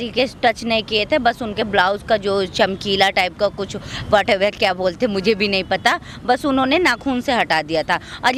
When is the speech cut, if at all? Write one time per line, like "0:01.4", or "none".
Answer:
none